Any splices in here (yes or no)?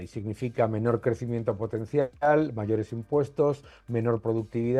no